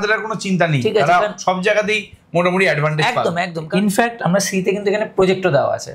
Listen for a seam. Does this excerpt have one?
yes; 1 cut; at 3.6 s

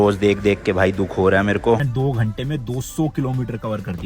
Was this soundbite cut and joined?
yes; 1 cut; at 1.8 s

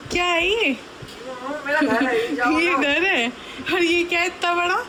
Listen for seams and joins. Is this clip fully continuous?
yes; 0 cuts

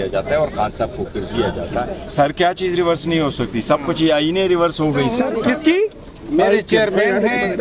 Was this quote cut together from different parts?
yes; 2 cuts; at 2.0 s, 5.2 s

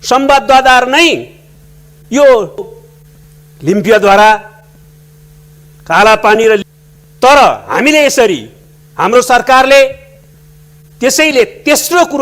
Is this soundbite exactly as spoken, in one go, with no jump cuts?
yes; 0 cuts

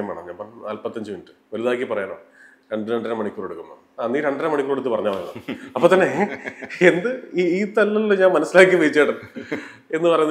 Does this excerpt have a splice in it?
no; 0 cuts

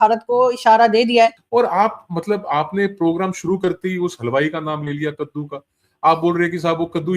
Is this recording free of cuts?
no; 1 cut; at 1.4 s

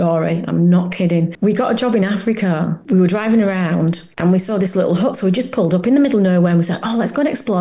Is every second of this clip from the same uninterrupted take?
no; 3 cuts; at 1.3 s, 2.8 s, 4.1 s

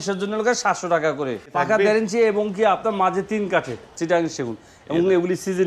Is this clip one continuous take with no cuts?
no; 2 cuts; at 1.4 s, 3.9 s

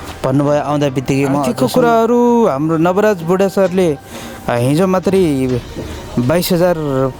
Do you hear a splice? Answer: yes; 1 cut; at 1.5 s

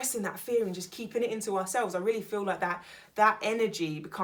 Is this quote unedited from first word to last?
yes; 0 cuts

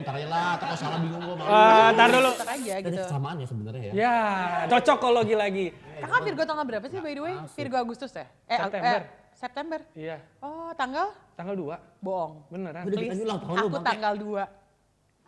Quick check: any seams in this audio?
yes; 2 cuts; at 2.4 s, 4.7 s

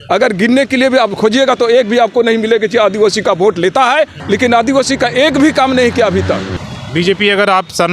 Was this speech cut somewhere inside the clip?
yes; 2 cuts; at 4.2 s, 6.5 s

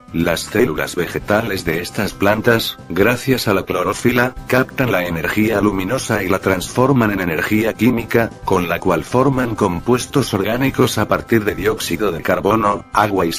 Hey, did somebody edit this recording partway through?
no; 0 cuts

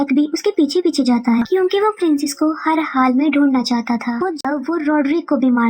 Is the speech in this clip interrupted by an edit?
yes; 1 cut; at 4.4 s

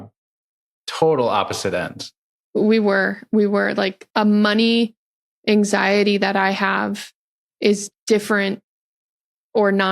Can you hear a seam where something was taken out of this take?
yes; 1 cut; at 4.0 s

